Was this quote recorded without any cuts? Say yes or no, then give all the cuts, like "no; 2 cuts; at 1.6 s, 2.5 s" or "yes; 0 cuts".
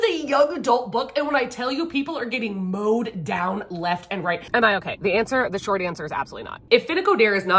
no; 2 cuts; at 4.4 s, 6.6 s